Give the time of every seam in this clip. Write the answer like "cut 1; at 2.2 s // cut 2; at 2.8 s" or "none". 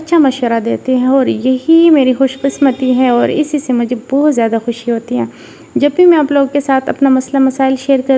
none